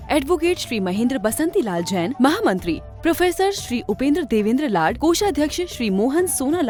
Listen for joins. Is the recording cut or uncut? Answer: uncut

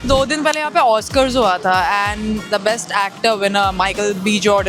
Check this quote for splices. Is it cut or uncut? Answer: uncut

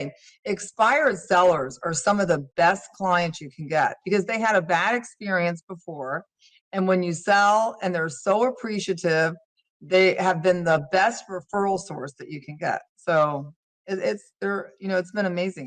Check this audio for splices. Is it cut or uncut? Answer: uncut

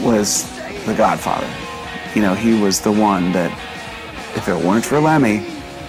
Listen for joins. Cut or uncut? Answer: uncut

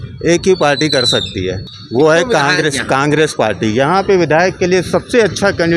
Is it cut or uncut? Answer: cut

